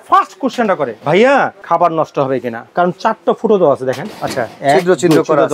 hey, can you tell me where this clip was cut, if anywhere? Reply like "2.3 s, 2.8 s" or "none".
1.0 s, 1.6 s, 2.6 s